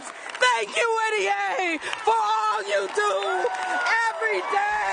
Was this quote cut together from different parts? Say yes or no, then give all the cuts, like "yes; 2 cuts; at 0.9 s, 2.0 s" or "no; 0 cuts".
yes; 1 cut; at 2.3 s